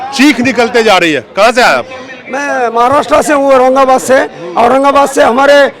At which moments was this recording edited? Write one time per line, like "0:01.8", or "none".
none